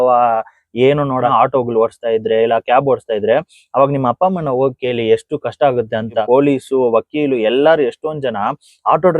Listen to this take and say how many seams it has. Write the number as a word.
two